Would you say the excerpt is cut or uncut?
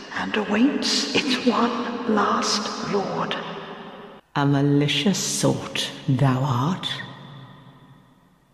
uncut